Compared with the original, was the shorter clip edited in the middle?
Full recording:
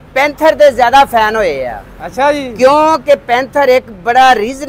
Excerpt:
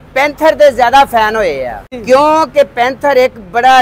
yes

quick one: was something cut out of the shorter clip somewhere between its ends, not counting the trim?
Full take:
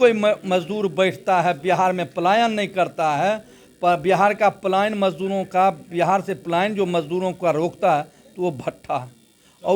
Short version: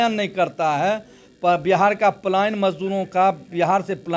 no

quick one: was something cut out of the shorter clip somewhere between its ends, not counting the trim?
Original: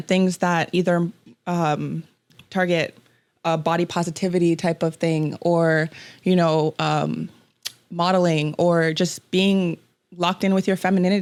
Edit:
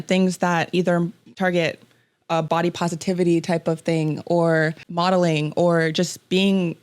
yes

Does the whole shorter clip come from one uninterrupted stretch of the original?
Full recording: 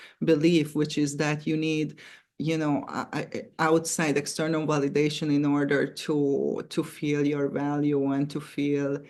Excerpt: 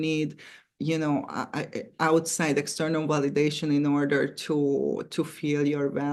yes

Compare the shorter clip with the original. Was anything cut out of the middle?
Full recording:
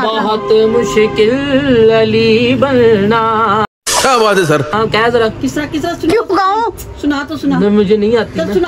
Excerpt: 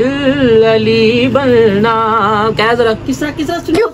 yes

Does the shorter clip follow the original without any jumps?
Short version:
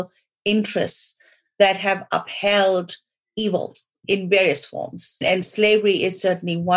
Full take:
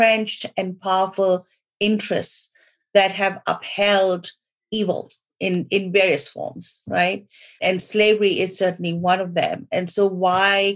no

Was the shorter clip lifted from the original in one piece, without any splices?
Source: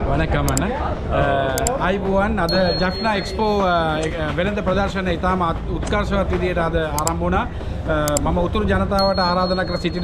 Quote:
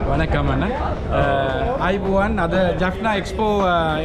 yes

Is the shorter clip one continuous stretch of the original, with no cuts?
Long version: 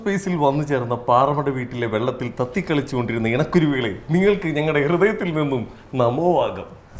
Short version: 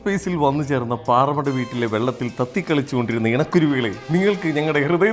yes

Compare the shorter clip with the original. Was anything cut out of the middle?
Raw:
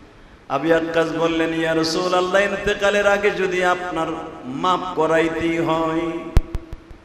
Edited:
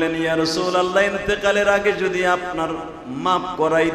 no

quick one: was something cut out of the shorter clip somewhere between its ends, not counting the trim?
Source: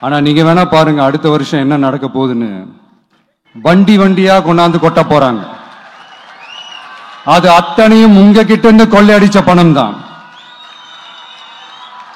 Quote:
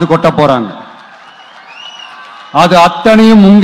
no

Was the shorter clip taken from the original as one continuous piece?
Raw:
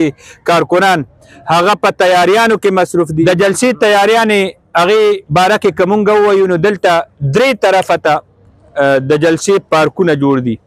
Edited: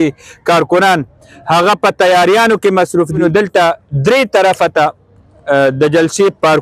no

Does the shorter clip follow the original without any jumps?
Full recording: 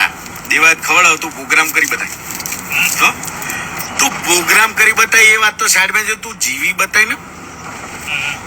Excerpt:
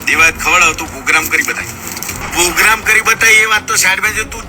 no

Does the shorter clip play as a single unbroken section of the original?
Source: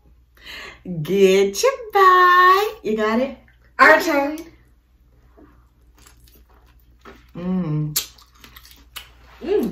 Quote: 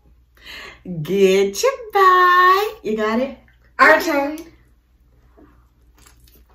yes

